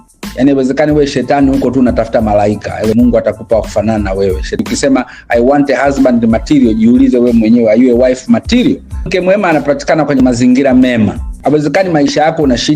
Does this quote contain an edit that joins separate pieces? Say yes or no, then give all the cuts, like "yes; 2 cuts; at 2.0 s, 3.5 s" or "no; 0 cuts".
yes; 4 cuts; at 2.9 s, 4.6 s, 9.1 s, 11.3 s